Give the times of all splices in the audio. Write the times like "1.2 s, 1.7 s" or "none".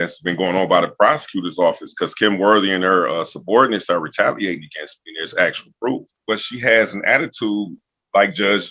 6.2 s

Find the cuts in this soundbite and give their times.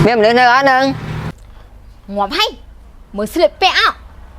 1.3 s

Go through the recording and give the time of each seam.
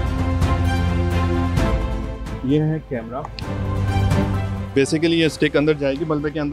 none

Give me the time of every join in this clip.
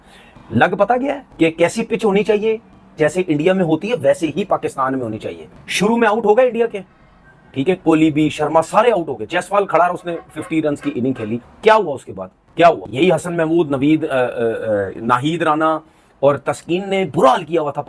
none

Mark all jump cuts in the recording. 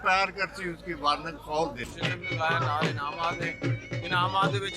1.9 s

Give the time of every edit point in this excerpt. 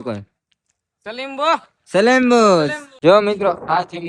1.8 s, 2.8 s

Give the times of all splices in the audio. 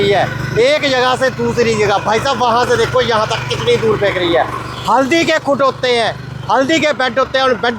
none

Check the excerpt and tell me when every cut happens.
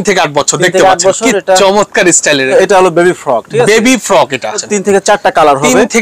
2.5 s, 4.6 s

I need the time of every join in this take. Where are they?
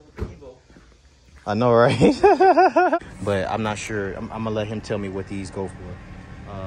3.0 s

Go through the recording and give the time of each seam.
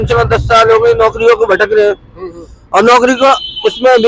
none

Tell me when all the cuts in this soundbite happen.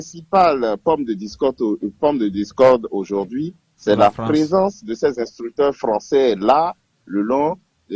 none

